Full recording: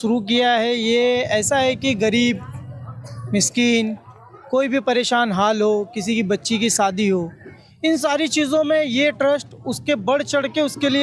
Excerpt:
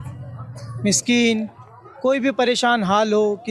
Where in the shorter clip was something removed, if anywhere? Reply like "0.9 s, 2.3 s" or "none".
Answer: none